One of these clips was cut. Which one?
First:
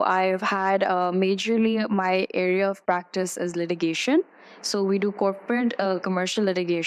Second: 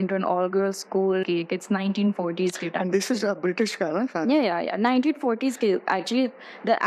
second; 1 cut; at 1.2 s

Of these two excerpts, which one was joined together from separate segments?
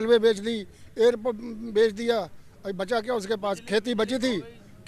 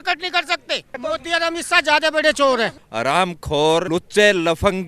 second; 3 cuts; at 1.0 s, 2.8 s, 3.9 s

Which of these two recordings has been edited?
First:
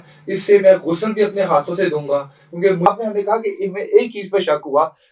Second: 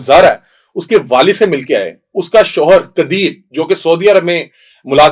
first; 1 cut; at 2.9 s

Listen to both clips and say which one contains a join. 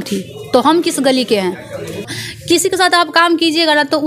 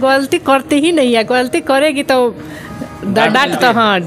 first; 1 cut; at 2.2 s

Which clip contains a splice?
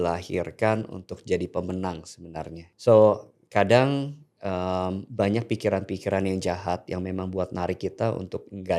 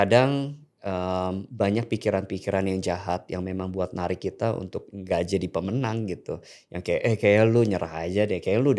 first; 1 cut; at 2.6 s

